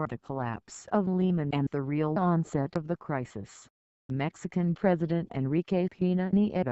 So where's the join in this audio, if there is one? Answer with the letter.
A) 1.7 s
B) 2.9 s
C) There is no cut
B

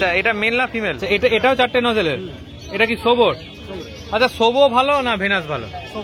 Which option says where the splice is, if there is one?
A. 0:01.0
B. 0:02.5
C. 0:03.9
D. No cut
A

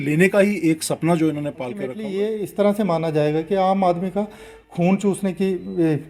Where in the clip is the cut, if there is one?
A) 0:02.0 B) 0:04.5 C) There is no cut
A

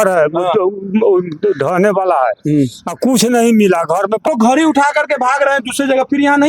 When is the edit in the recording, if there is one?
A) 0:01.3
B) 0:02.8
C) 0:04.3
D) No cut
C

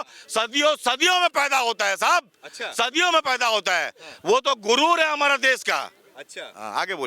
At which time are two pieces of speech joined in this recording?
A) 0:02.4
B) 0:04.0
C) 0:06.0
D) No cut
D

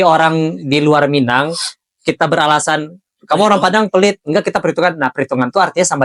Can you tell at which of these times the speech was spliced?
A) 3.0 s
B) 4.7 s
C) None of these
C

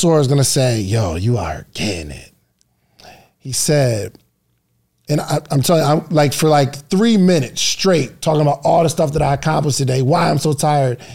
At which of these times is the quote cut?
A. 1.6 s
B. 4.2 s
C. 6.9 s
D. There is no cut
D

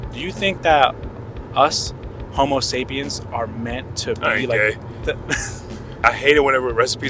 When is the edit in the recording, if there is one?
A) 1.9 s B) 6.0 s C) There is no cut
B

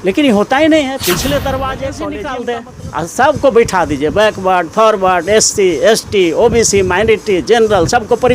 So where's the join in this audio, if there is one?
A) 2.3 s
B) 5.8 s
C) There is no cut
A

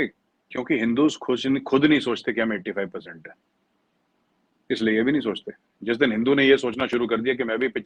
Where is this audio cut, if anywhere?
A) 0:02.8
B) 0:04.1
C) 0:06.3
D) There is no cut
D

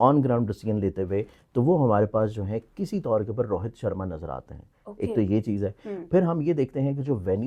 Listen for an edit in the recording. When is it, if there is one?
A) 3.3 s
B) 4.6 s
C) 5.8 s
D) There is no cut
D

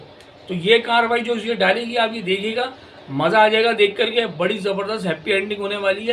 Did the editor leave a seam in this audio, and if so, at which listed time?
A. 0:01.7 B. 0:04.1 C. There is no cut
C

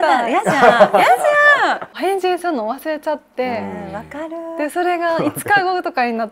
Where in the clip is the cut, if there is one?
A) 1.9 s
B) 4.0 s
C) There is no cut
A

